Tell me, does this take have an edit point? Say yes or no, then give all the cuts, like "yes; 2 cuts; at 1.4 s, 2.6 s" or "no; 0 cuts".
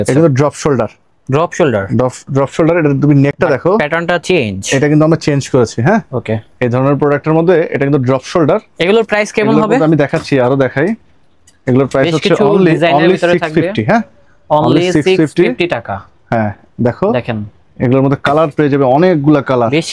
no; 0 cuts